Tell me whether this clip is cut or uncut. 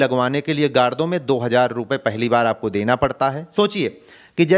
cut